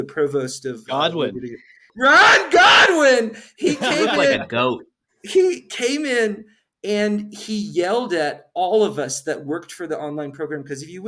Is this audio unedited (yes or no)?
no